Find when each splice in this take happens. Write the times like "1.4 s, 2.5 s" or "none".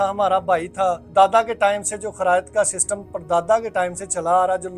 1.0 s